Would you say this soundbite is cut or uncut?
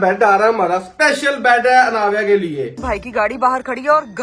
cut